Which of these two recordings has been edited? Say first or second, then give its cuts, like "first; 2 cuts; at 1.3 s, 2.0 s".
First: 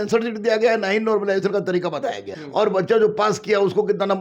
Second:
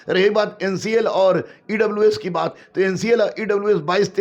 first; 1 cut; at 2.3 s